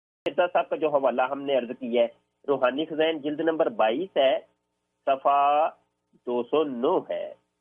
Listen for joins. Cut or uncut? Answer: cut